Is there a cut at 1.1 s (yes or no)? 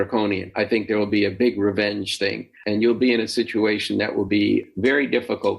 no